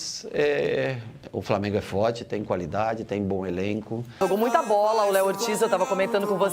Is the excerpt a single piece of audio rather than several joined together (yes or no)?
no